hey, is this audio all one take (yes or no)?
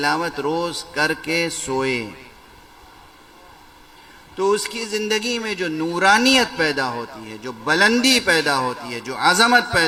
yes